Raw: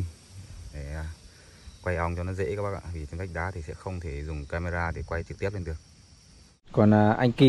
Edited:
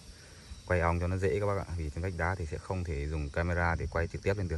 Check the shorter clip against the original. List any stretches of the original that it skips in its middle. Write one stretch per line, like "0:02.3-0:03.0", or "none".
none